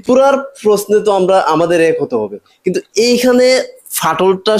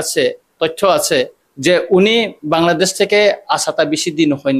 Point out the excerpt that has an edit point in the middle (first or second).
second